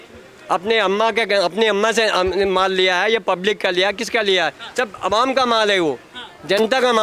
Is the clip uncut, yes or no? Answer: yes